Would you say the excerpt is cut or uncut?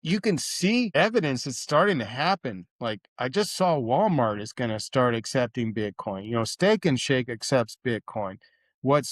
cut